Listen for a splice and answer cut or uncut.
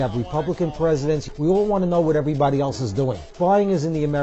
cut